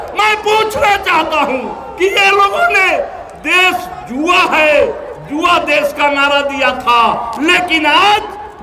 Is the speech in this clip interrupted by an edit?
no; 0 cuts

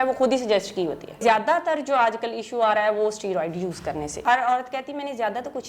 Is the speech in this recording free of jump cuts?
no; 2 cuts; at 1.2 s, 4.2 s

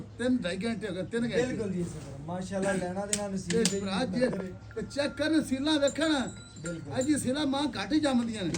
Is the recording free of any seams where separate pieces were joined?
yes; 0 cuts

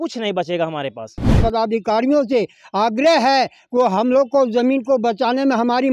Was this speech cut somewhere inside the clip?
yes; 1 cut; at 1.4 s

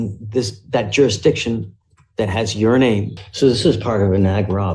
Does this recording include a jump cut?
yes; 1 cut; at 3.2 s

